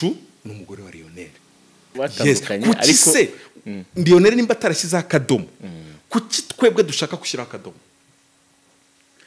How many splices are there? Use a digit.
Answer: 1